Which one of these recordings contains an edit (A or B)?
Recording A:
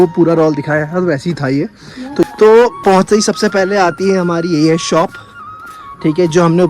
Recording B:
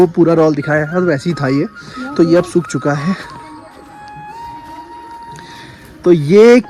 A